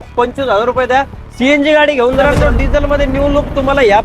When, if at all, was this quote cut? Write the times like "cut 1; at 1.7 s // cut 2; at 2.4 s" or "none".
cut 1; at 2.2 s